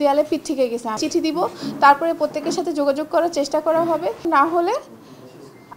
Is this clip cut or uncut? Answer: cut